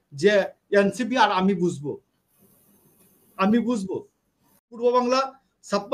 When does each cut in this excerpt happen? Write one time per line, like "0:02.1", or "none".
0:04.7